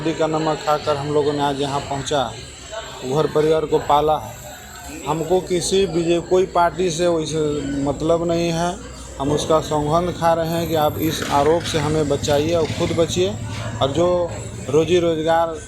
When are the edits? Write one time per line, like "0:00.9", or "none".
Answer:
none